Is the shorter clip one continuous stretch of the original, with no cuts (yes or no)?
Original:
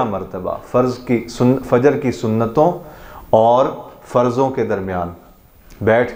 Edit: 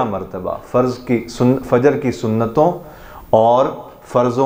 yes